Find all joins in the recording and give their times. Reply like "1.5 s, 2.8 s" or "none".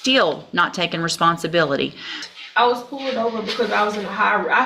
2.2 s